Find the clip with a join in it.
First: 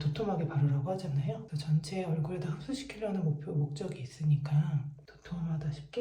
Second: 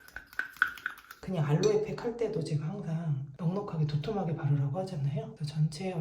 second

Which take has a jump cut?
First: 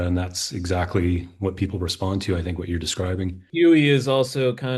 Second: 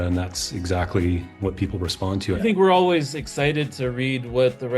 second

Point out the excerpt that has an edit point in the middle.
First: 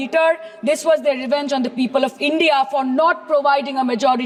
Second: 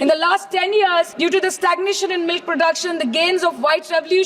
second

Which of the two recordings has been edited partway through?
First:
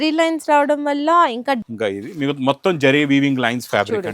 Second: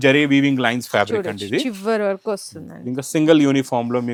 first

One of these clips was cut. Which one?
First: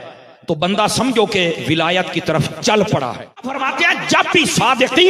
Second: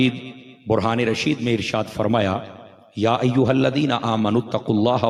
first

